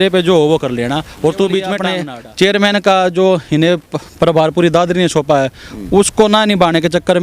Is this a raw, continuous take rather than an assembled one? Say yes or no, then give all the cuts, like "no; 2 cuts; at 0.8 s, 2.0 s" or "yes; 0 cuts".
no; 1 cut; at 1.9 s